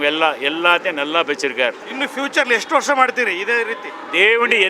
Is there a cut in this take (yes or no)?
yes